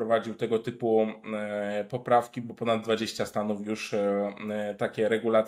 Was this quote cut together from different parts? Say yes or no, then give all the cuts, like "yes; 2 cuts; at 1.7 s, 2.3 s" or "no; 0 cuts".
no; 0 cuts